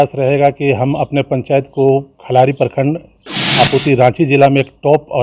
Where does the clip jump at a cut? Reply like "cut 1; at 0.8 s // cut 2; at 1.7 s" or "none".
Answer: none